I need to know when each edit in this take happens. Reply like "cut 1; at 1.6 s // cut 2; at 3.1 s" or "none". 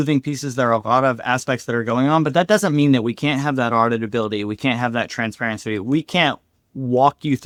none